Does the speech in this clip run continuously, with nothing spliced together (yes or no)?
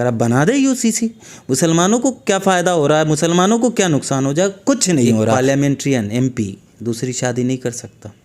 no